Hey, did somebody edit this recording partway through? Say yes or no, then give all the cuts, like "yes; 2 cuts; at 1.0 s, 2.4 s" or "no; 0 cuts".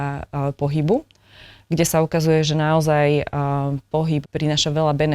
yes; 1 cut; at 4.2 s